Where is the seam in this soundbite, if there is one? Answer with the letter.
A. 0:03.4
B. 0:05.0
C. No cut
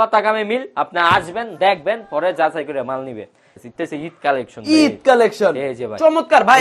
A